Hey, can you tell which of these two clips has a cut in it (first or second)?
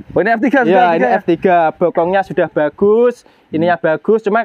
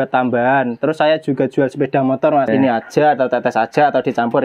second